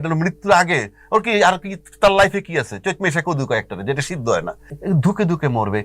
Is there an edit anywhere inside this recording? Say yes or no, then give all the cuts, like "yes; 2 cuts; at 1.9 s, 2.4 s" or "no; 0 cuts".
yes; 1 cut; at 4.6 s